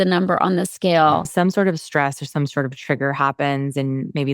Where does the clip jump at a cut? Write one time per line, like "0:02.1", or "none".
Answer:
0:01.3